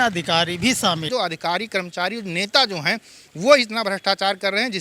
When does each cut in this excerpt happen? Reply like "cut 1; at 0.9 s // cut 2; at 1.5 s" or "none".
cut 1; at 1.1 s